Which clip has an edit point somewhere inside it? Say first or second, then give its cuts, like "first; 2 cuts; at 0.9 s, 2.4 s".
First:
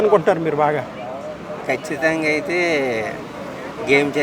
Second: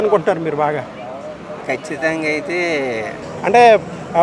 second; 1 cut; at 3.2 s